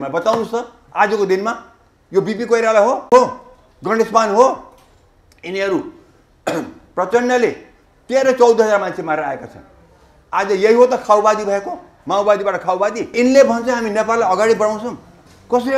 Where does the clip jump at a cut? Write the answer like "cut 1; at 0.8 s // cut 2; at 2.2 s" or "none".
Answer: cut 1; at 13.1 s